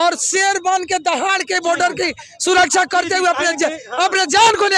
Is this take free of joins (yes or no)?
yes